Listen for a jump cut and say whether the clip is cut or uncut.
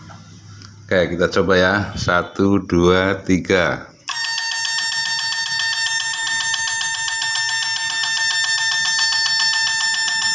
uncut